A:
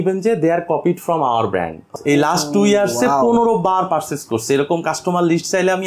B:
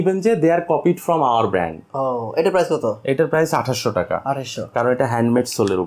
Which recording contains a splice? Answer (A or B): A